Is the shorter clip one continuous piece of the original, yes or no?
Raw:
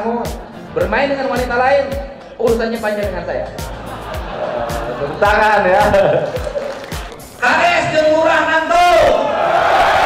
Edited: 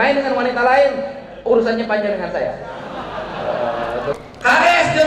no